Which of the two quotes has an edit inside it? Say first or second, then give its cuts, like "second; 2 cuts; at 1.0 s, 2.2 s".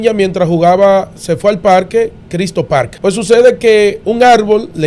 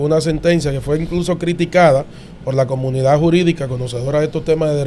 first; 2 cuts; at 2.9 s, 4.0 s